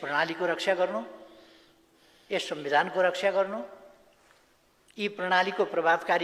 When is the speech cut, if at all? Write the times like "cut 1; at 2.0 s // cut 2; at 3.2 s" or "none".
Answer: none